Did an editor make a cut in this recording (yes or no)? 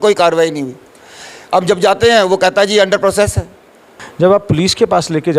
yes